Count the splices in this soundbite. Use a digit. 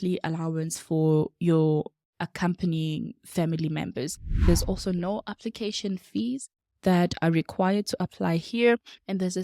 1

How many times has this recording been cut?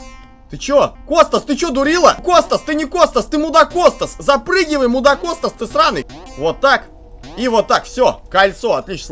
3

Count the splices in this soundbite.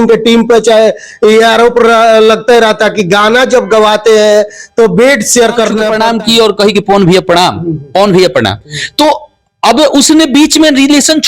1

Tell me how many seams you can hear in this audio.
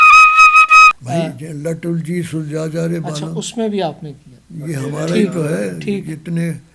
1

